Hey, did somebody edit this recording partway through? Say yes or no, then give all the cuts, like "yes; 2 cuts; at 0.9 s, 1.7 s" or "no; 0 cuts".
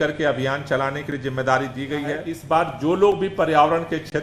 yes; 1 cut; at 2.3 s